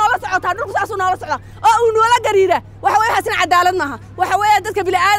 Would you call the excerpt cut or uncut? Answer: uncut